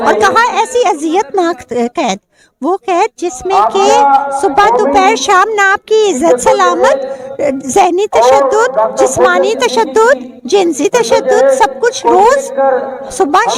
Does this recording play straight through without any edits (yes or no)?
yes